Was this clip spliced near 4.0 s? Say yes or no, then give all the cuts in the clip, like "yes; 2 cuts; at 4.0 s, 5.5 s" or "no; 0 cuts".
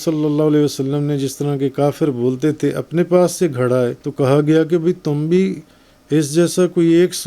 yes; 1 cut; at 4.0 s